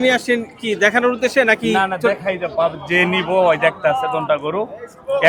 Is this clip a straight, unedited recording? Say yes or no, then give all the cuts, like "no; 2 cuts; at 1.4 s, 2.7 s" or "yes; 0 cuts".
yes; 0 cuts